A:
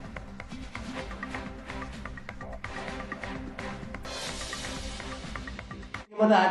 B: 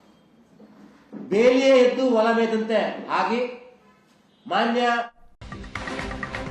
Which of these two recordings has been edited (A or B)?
B